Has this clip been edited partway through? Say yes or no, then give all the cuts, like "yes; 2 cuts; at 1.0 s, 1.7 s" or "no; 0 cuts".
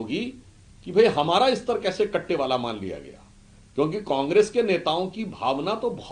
no; 0 cuts